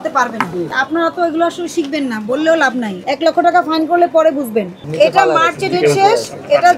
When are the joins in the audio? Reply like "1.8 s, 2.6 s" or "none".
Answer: 0.7 s, 3.0 s, 4.9 s